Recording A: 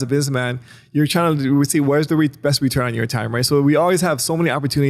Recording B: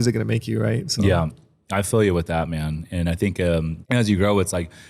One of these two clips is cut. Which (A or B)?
B